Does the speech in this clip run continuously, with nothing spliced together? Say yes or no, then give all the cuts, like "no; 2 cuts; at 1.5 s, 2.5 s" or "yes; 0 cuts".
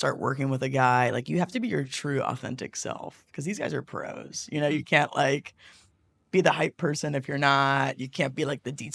yes; 0 cuts